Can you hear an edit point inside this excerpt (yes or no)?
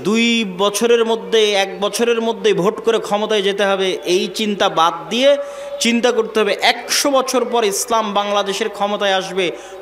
no